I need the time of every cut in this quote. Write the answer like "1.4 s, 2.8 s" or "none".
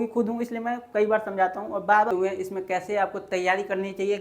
2.1 s

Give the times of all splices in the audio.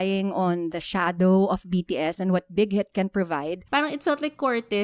3.6 s

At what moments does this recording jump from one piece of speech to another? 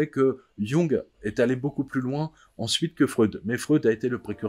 1.2 s

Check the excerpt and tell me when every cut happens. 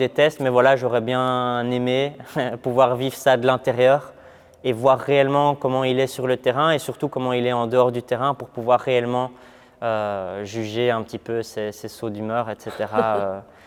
none

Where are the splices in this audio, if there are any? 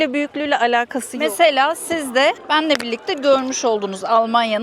1.0 s, 2.4 s

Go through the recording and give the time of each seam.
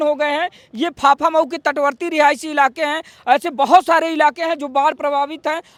none

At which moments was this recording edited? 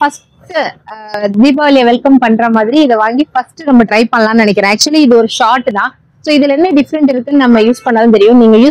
none

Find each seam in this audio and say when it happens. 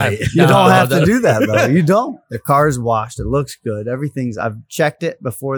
2.2 s

